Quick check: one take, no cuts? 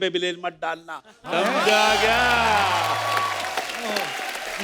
yes; 0 cuts

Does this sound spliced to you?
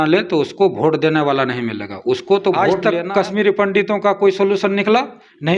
yes; 1 cut; at 2.7 s

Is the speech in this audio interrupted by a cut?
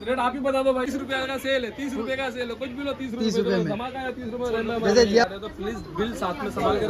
yes; 2 cuts; at 1.0 s, 5.2 s

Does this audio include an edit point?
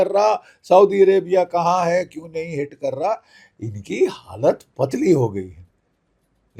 no; 0 cuts

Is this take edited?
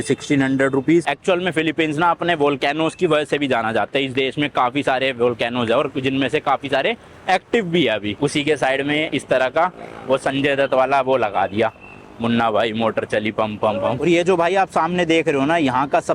yes; 3 cuts; at 1.0 s, 8.1 s, 14.0 s

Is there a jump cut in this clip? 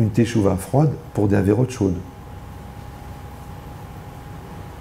no; 0 cuts

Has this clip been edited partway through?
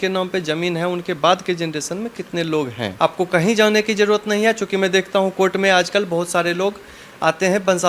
yes; 1 cut; at 2.8 s

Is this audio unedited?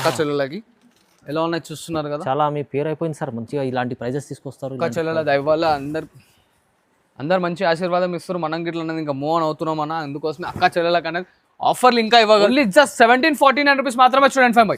no; 1 cut; at 12.5 s

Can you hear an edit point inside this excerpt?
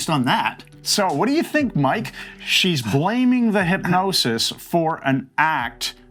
no; 0 cuts

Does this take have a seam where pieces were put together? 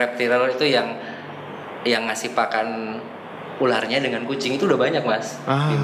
no; 0 cuts

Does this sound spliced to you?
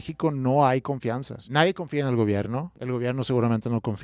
yes; 2 cuts; at 1.3 s, 2.7 s

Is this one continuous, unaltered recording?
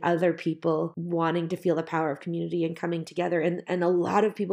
no; 1 cut; at 1.0 s

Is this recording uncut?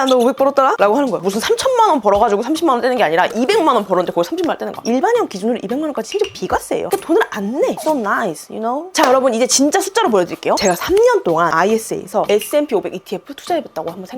no; 4 cuts; at 1.2 s, 4.8 s, 8.9 s, 10.6 s

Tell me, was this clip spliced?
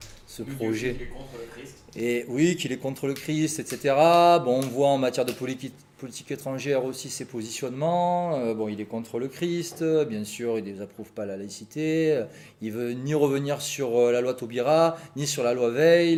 no; 0 cuts

